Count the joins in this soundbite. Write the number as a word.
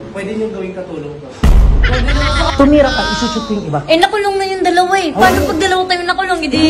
two